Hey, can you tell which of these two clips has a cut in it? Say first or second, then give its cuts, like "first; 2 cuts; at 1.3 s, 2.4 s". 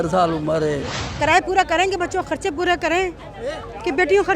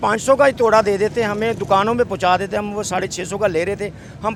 first; 1 cut; at 1.0 s